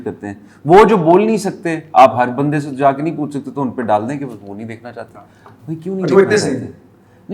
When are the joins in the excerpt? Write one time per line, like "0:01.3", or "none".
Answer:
none